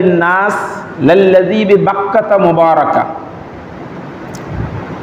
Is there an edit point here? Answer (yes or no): no